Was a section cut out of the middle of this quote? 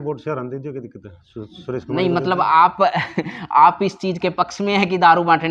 no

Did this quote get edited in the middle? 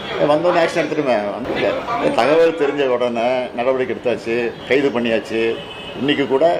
yes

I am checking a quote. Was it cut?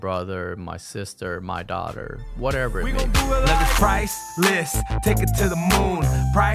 yes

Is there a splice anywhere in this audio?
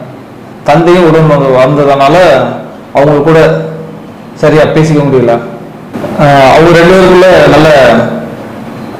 no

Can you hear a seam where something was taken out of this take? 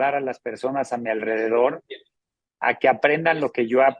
no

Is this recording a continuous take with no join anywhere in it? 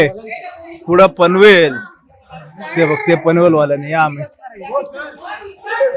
yes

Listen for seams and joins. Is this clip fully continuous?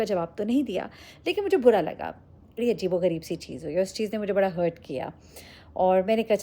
no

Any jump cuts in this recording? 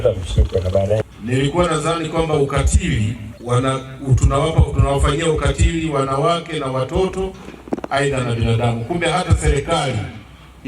yes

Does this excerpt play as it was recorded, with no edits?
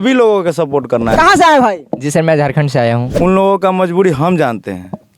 no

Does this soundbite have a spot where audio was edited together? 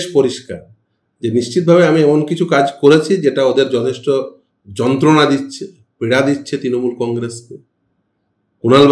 no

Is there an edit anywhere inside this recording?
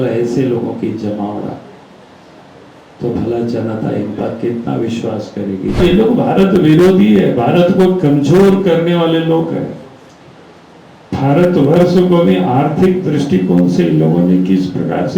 yes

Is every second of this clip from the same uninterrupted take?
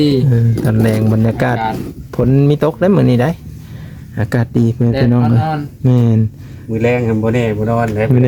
yes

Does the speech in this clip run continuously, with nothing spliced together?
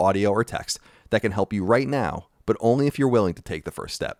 yes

